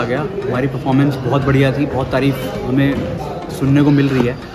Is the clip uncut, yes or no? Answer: yes